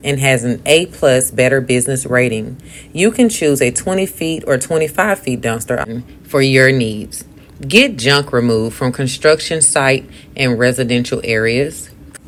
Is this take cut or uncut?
uncut